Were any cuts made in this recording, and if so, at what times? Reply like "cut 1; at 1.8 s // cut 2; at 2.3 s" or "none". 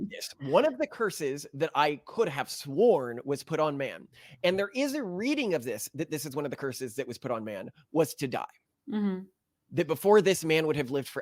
none